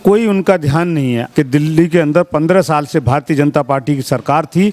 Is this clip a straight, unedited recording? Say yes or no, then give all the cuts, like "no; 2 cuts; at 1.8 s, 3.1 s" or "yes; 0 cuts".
no; 1 cut; at 1.2 s